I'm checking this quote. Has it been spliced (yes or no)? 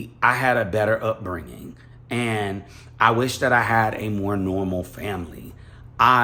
no